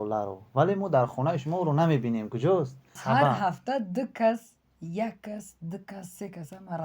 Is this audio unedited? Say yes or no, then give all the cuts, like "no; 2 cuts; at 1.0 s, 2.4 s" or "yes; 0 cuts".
no; 1 cut; at 2.9 s